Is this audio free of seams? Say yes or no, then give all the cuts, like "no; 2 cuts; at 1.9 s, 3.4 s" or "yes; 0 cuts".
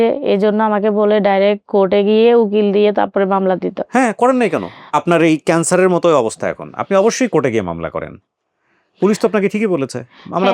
no; 1 cut; at 4.9 s